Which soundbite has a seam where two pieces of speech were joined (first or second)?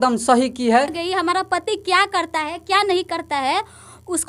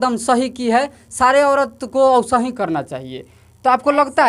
first